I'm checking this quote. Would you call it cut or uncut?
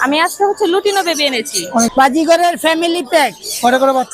cut